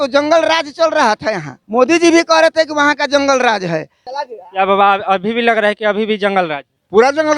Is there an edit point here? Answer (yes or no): yes